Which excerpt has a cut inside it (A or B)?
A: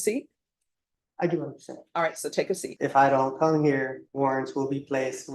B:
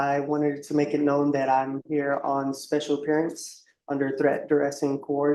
A